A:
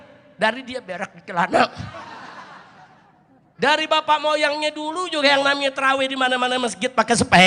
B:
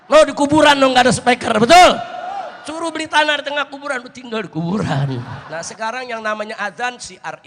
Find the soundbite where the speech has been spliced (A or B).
B